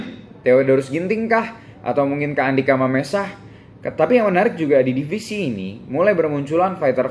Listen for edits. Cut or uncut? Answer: uncut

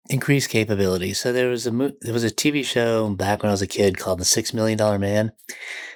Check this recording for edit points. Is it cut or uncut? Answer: uncut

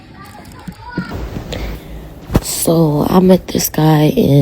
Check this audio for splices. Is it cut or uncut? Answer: cut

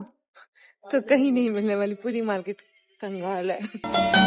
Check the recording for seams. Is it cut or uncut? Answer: uncut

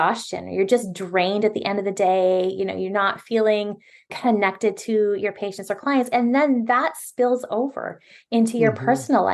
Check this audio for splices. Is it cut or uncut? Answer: uncut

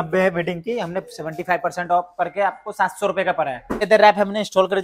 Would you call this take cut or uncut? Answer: cut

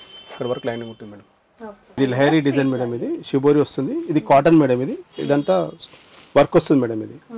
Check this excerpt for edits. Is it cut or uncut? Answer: cut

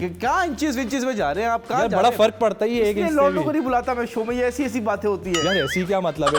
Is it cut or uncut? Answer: uncut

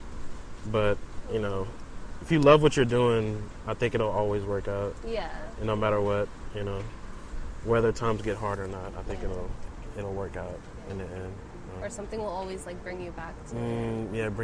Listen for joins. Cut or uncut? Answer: cut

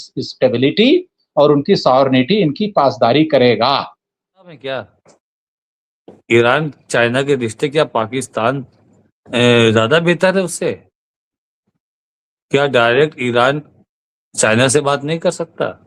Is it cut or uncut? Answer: cut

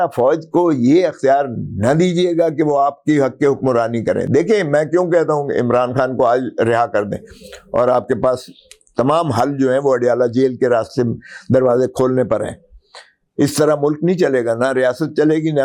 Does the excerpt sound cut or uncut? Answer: uncut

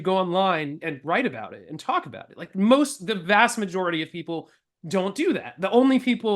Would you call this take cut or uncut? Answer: cut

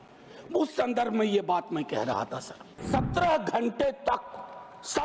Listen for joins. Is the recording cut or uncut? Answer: cut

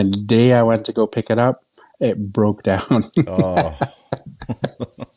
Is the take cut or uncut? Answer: uncut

